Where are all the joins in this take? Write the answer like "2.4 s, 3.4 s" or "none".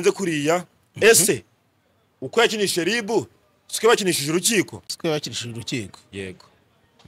none